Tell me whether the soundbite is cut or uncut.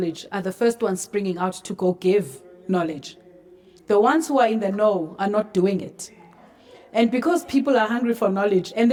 uncut